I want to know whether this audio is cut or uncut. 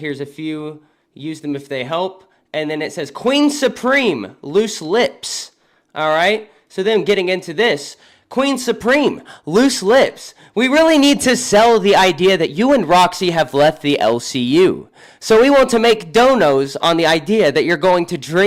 uncut